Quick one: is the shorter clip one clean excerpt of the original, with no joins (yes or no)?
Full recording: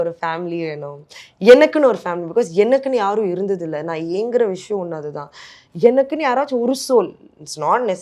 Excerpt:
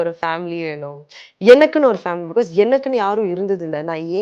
yes